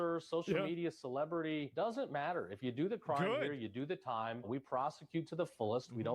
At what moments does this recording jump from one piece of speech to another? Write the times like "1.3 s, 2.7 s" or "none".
4.5 s

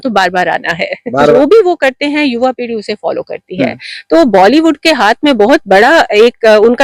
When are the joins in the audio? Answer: 1.3 s

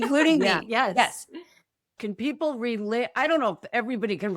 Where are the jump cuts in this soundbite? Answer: 1.9 s

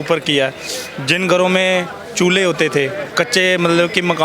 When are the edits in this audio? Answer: none

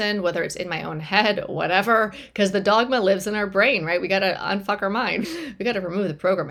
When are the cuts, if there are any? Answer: none

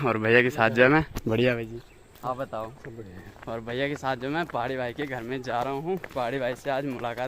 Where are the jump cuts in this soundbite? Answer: none

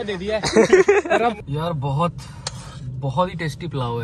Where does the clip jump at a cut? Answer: 1.5 s

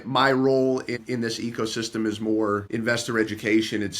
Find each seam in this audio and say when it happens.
1.0 s, 2.7 s

